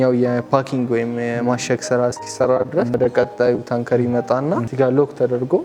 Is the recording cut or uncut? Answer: cut